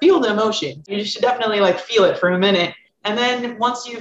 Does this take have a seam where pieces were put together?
yes; 2 cuts; at 0.9 s, 2.9 s

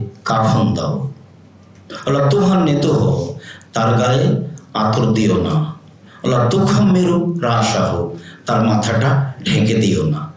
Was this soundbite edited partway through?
no; 0 cuts

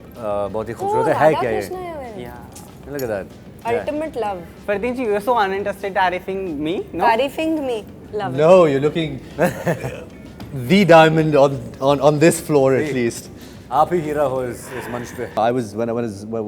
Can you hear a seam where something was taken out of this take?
yes; 1 cut; at 15.3 s

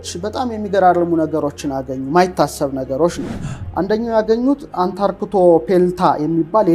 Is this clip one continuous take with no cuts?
yes; 0 cuts

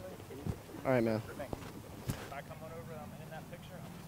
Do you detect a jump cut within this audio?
yes; 1 cut; at 2.1 s

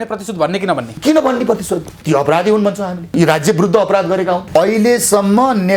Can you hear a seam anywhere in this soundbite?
yes; 4 cuts; at 0.9 s, 2.0 s, 3.1 s, 4.4 s

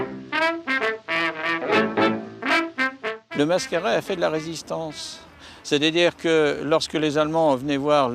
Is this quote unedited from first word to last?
no; 1 cut; at 4.9 s

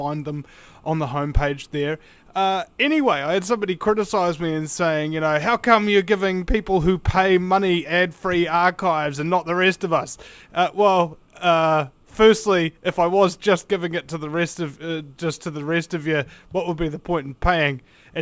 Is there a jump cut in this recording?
yes; 1 cut; at 9.2 s

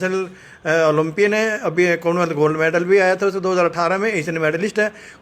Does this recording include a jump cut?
no; 0 cuts

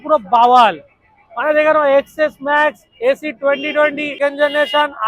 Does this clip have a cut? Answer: yes; 1 cut; at 4.2 s

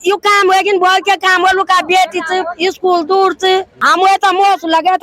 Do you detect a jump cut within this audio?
yes; 1 cut; at 3.8 s

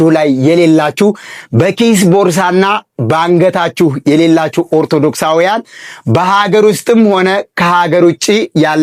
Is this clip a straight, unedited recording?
yes; 0 cuts

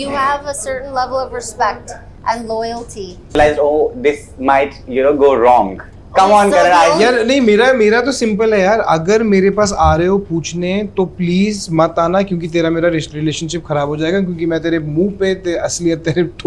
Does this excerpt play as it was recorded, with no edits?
no; 1 cut; at 3.3 s

